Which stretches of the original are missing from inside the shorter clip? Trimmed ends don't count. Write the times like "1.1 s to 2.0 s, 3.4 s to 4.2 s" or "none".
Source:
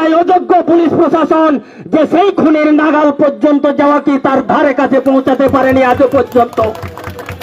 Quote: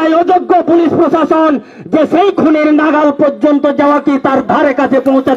none